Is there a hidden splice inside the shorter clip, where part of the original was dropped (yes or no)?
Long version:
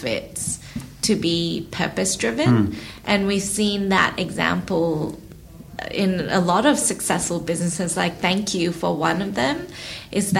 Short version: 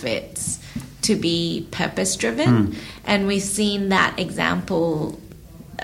no